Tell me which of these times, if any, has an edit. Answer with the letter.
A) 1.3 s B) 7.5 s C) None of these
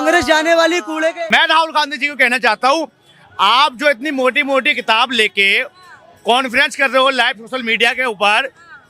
A